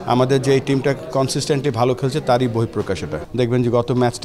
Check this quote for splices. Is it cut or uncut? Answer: cut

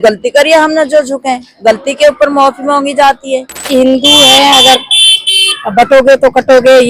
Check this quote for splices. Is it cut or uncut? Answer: cut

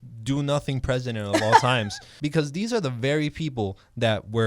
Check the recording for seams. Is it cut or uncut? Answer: cut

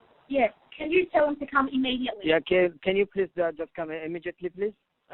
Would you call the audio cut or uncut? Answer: uncut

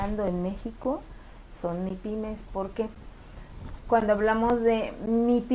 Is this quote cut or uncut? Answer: cut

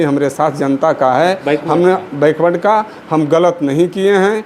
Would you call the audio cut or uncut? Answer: uncut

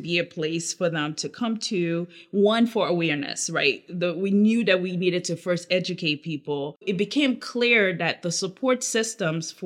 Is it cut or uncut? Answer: cut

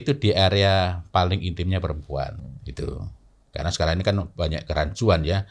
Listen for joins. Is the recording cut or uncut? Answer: cut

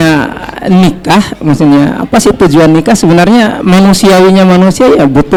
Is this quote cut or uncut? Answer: uncut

